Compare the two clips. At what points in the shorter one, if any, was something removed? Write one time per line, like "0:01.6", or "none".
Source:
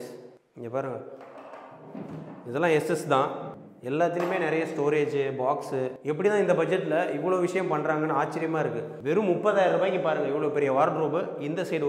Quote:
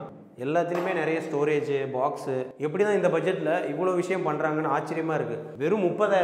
none

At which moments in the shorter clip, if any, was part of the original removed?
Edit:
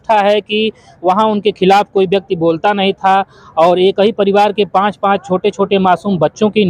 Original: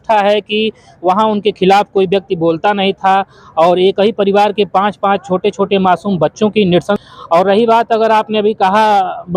none

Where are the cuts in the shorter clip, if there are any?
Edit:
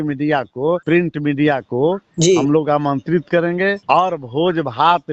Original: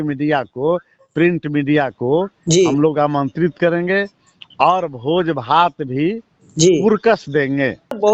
0:00.8
0:03.8

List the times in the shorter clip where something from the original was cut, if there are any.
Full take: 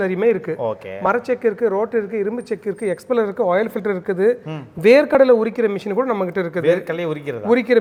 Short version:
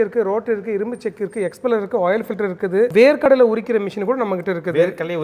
0:02.9

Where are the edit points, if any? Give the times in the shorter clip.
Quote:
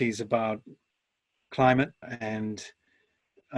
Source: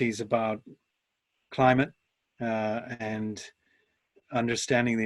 0:02.1

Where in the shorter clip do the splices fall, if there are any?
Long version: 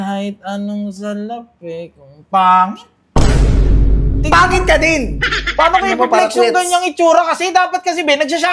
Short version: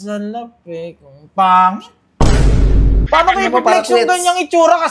0:02.9

